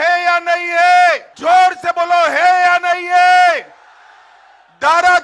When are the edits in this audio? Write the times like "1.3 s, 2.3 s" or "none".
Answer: 1.3 s